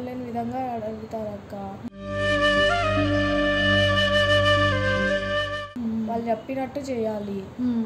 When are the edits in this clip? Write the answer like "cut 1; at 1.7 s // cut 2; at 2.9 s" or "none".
none